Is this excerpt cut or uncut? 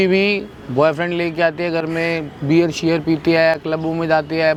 uncut